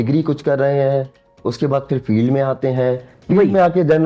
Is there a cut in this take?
no; 0 cuts

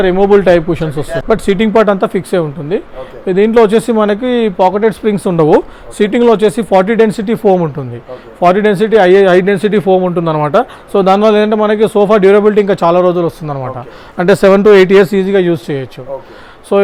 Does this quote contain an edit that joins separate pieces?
no; 0 cuts

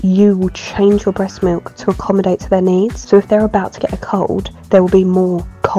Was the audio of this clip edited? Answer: yes; 2 cuts; at 3.0 s, 4.5 s

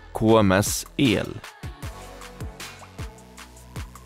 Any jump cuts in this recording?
yes; 1 cut; at 1.4 s

